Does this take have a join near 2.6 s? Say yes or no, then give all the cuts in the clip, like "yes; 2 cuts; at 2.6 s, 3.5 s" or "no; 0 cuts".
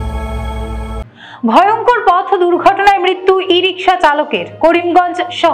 no; 1 cut; at 1.0 s